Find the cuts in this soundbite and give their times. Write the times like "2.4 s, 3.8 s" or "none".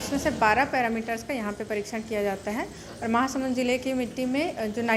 none